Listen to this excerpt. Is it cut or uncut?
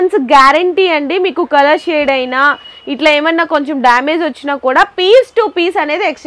uncut